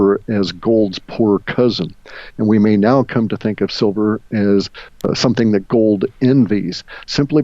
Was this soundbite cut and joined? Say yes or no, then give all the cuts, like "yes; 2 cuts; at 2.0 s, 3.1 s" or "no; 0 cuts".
yes; 1 cut; at 5.0 s